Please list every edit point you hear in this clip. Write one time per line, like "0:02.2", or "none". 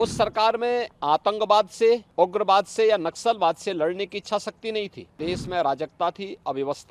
0:00.9
0:02.1
0:05.1